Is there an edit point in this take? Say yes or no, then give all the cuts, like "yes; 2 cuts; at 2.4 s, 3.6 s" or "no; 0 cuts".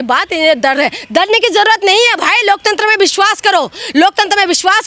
no; 0 cuts